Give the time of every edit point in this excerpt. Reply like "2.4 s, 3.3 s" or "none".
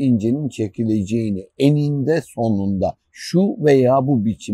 none